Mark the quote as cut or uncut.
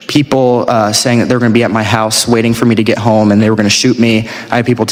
uncut